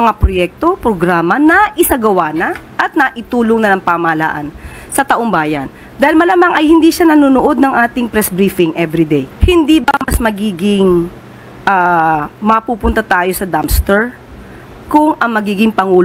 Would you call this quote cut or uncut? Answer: cut